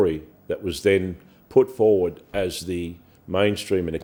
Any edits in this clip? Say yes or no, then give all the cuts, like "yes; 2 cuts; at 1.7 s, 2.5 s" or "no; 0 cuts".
no; 0 cuts